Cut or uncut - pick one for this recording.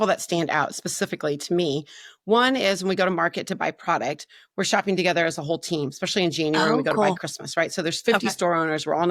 uncut